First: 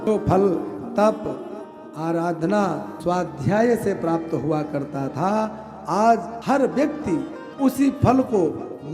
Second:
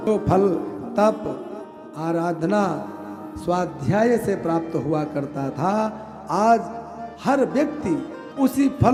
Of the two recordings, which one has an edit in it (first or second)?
first